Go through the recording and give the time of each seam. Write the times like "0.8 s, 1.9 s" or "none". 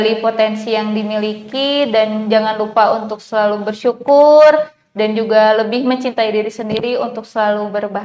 none